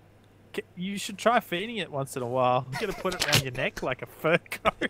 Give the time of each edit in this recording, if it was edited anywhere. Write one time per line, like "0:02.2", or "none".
0:02.7